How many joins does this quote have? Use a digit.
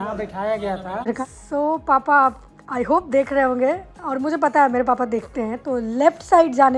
1